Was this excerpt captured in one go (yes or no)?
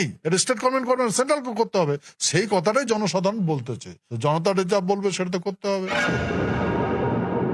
no